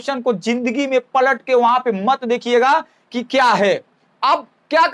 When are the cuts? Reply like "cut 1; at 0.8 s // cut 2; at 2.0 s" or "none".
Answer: none